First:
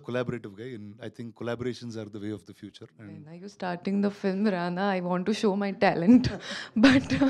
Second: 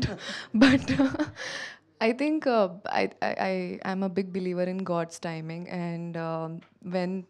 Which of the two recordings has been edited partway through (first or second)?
first